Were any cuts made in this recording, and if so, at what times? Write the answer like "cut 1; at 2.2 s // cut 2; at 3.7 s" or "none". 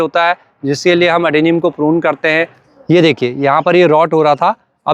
cut 1; at 2.5 s